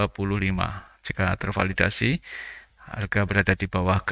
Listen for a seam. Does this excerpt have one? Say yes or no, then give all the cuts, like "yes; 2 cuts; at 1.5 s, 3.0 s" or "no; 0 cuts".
no; 0 cuts